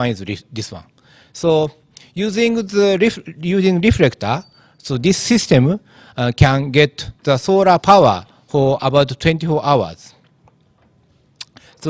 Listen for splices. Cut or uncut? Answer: cut